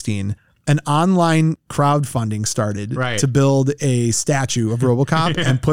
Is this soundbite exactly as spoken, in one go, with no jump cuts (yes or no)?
yes